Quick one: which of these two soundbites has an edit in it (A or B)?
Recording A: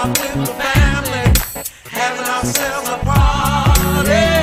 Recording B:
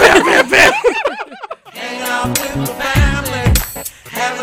B